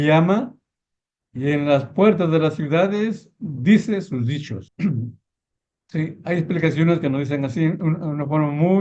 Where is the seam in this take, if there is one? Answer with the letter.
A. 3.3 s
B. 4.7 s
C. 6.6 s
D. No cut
B